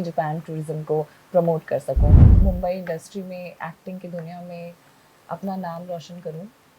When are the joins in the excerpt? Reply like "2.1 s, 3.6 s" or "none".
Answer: 2.3 s